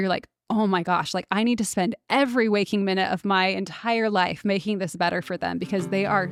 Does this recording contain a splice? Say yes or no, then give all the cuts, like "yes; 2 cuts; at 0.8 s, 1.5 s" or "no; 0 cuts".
no; 0 cuts